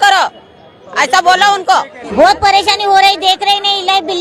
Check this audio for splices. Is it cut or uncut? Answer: cut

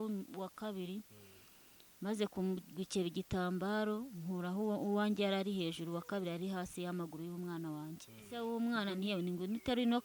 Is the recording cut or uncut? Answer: cut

